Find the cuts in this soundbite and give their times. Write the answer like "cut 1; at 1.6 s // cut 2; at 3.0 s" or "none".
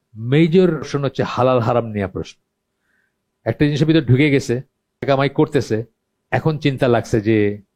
cut 1; at 0.9 s // cut 2; at 5.0 s